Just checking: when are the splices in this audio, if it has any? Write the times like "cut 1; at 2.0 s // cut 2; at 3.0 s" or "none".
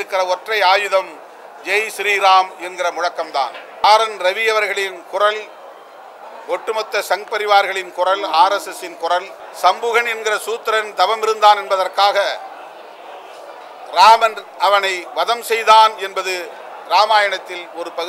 cut 1; at 3.8 s // cut 2; at 9.4 s